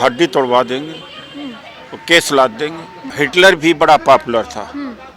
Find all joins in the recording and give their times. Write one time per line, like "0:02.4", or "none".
0:03.0